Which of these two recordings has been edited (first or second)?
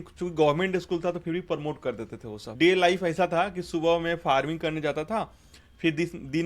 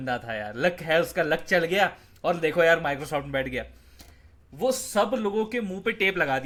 first